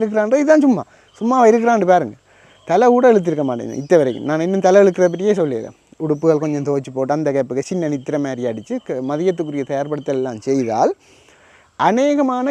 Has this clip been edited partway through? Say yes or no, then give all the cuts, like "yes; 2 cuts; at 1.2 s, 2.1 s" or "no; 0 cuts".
no; 0 cuts